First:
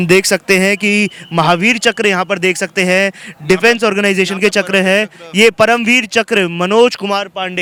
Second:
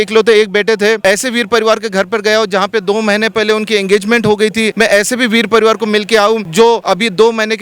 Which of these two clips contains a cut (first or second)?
second